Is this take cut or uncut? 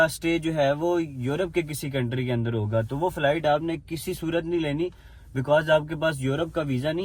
uncut